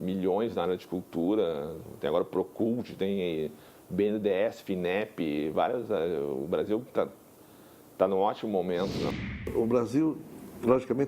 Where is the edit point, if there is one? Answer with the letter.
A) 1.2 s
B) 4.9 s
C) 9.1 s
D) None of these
C